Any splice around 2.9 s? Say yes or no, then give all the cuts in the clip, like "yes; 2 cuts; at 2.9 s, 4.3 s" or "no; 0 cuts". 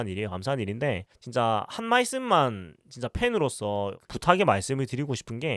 no; 0 cuts